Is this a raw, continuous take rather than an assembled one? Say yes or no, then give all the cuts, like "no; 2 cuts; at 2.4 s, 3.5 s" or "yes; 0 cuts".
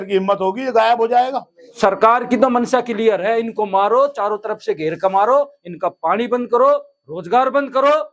no; 1 cut; at 1.8 s